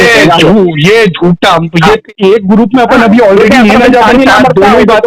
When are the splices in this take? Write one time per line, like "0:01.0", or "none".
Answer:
0:02.0